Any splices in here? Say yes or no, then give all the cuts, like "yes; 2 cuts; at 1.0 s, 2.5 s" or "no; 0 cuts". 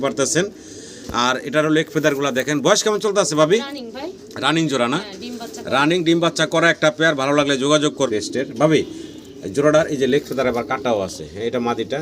yes; 1 cut; at 8.1 s